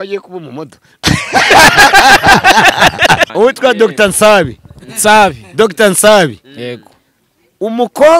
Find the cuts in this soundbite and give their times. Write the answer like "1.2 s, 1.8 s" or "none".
3.3 s